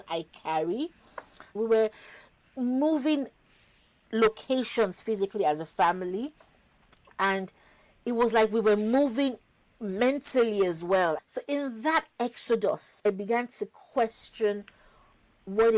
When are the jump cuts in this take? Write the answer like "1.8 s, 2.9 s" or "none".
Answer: 1.5 s, 11.2 s, 13.0 s